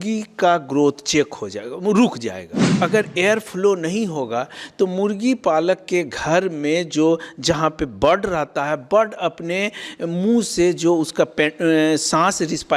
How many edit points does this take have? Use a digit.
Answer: 1